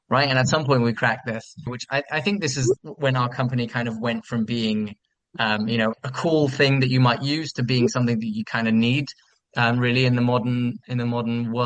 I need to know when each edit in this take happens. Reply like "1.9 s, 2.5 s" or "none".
1.8 s, 2.8 s, 5.9 s